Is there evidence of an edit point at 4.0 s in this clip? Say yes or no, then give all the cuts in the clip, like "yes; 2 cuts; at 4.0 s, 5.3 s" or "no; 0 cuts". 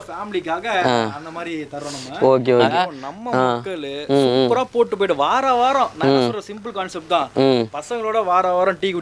no; 1 cut; at 2.6 s